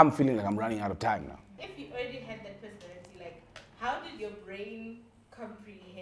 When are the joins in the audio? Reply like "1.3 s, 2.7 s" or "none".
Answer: 1.5 s